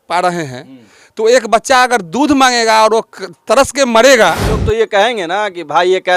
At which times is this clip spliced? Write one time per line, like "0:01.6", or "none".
0:04.6